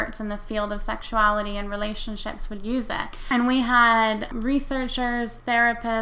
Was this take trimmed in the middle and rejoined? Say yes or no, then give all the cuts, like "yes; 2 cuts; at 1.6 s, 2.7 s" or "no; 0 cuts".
yes; 2 cuts; at 3.1 s, 4.3 s